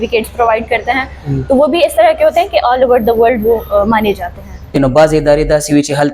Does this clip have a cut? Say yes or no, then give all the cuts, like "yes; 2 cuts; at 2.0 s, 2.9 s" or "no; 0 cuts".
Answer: yes; 1 cut; at 4.7 s